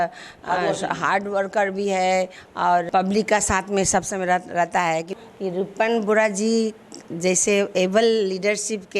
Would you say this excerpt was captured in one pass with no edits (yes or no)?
no